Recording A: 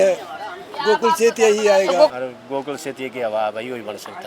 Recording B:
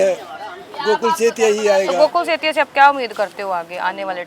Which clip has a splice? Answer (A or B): A